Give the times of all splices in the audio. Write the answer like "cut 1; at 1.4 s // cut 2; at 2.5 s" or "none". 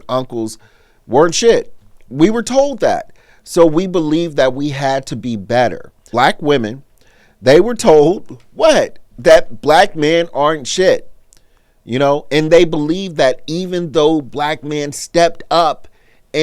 cut 1; at 6.1 s